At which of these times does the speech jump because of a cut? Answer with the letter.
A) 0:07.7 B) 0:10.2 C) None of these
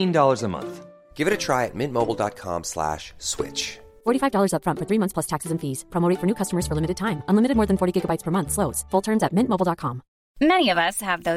C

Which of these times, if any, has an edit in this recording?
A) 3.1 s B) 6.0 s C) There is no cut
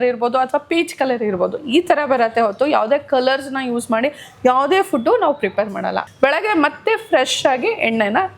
B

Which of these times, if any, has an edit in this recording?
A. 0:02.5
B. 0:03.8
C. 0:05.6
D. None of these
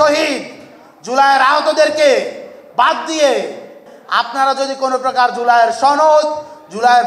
B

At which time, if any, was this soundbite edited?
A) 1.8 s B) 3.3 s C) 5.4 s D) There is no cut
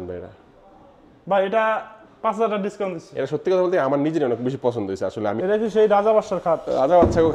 C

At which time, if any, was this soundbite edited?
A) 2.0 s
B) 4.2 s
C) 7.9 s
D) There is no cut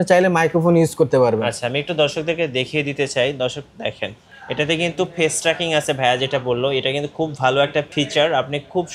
C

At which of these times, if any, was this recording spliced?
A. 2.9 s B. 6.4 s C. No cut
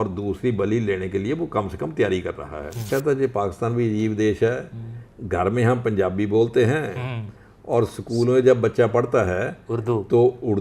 A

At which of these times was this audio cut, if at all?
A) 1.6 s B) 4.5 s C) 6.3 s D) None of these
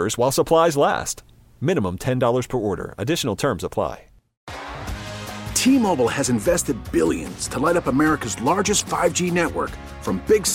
B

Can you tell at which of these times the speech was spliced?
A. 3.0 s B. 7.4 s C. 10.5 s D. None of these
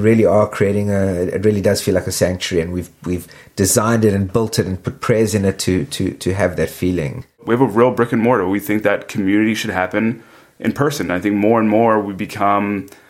B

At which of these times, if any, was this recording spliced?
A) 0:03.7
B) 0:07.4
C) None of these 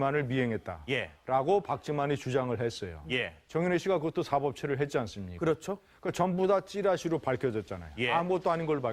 C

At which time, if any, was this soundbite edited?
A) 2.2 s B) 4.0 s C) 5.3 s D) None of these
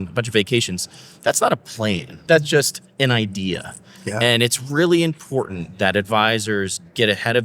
A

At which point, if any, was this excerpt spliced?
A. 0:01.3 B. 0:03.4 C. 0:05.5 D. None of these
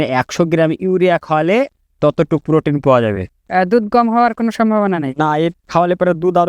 B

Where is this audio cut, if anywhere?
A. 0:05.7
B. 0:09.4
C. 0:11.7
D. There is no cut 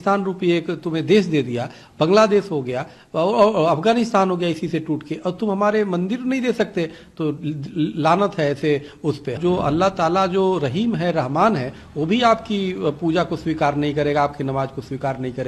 B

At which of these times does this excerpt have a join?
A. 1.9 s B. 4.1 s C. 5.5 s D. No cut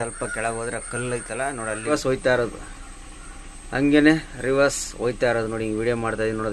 A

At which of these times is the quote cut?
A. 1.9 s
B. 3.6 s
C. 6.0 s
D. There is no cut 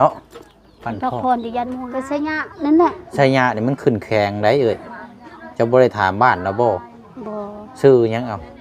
A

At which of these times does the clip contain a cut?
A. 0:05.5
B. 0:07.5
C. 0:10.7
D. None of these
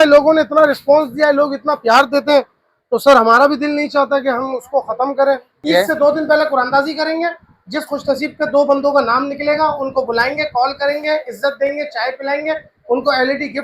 A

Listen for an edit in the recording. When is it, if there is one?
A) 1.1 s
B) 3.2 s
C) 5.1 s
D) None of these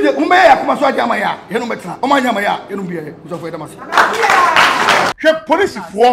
C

